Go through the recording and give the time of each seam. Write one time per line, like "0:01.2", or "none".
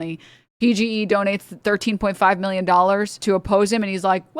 0:01.5
0:03.1